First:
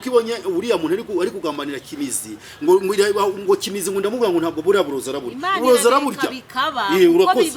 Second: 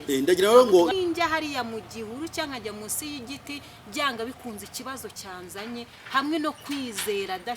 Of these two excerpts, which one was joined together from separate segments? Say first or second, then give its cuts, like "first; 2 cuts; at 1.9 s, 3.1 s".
second; 1 cut; at 0.9 s